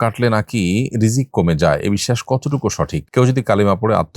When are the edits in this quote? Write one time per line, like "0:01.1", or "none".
0:03.0